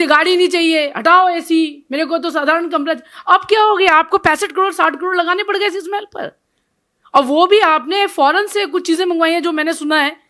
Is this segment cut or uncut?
uncut